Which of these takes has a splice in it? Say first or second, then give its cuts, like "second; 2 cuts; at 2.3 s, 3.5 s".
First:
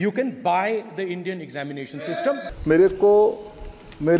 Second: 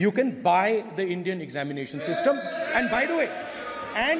first; 1 cut; at 2.5 s